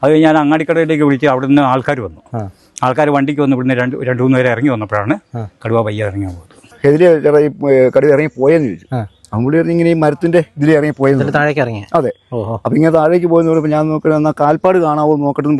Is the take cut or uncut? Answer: cut